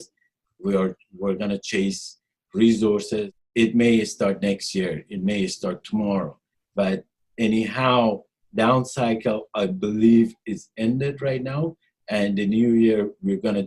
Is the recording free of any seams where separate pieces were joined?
no; 1 cut; at 3.4 s

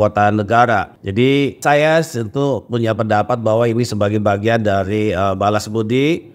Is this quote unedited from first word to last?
no; 1 cut; at 1.5 s

